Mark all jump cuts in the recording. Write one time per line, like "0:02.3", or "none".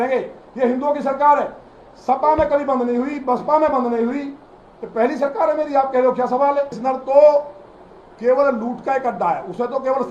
0:06.8